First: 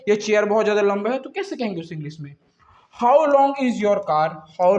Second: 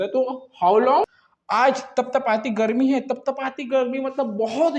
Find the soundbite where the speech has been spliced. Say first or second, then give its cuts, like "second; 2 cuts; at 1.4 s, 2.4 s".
second; 1 cut; at 1.2 s